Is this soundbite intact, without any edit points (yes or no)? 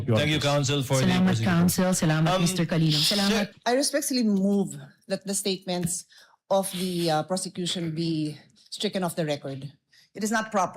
no